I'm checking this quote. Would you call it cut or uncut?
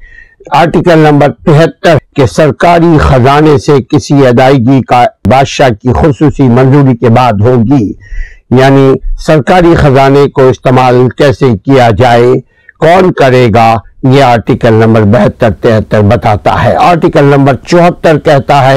cut